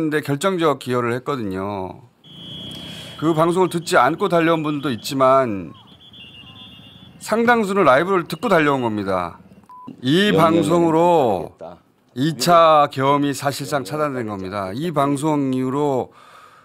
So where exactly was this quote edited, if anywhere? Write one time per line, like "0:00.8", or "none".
0:09.9

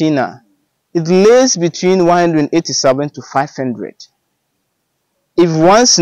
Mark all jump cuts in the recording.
none

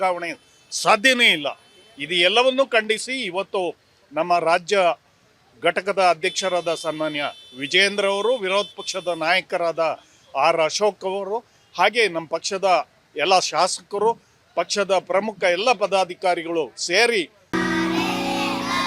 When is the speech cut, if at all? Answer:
none

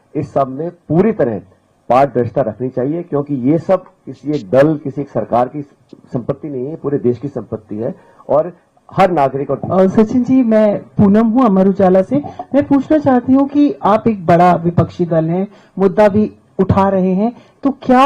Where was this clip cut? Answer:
0:09.6

